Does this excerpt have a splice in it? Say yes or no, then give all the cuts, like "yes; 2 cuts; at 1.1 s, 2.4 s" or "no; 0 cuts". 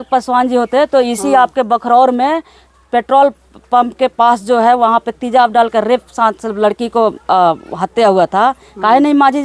no; 0 cuts